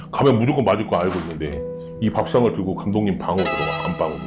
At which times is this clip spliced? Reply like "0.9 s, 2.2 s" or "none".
1.8 s